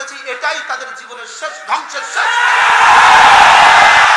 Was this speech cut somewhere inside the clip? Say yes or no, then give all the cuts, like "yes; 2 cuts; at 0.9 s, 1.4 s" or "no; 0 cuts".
no; 0 cuts